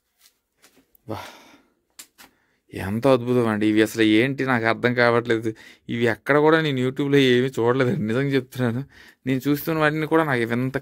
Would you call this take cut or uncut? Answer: uncut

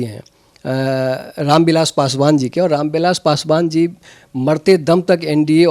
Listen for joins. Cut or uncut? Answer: uncut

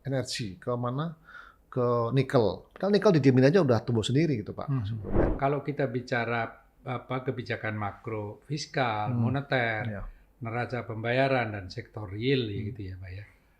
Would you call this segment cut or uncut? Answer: cut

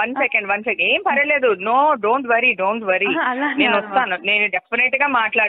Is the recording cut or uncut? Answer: cut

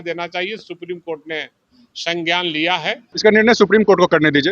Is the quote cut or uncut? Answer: cut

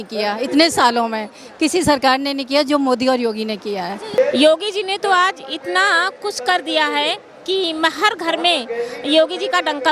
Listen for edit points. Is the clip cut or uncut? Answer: cut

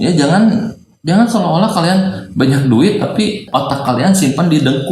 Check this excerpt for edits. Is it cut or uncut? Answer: cut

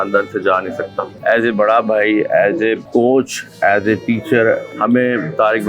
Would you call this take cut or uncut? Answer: cut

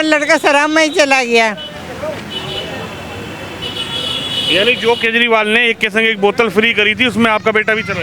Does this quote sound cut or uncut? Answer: uncut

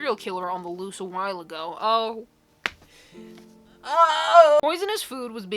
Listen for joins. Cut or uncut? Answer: uncut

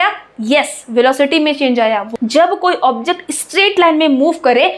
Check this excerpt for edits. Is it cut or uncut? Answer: cut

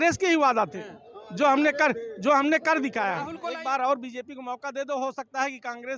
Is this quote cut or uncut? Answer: cut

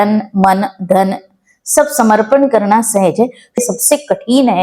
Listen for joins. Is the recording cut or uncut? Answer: cut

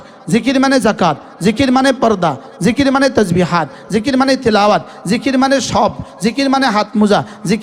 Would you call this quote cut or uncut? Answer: uncut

